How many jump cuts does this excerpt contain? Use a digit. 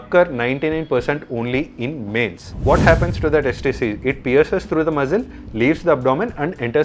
1